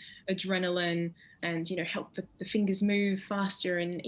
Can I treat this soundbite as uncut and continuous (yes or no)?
no